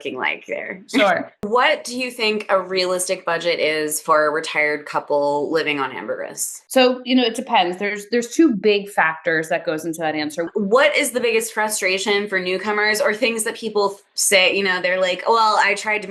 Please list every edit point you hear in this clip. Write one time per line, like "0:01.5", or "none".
0:01.5
0:10.5